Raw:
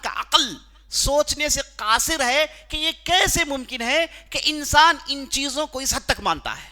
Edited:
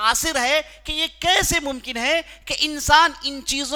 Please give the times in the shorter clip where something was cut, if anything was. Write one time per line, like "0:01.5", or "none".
none